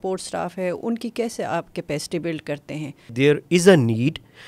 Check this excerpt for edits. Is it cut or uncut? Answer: cut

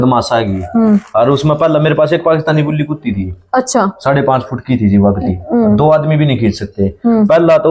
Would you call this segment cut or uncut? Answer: uncut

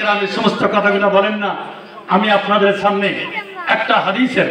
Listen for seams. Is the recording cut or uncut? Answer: uncut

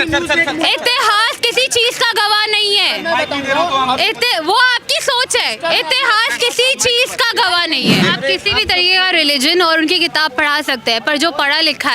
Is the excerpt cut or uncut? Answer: cut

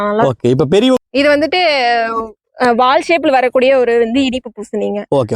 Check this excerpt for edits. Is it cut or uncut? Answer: cut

